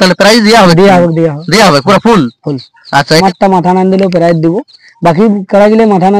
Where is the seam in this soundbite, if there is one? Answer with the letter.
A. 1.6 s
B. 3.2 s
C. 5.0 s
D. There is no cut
B